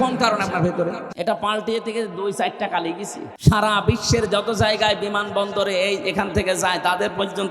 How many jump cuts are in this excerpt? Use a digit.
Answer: 2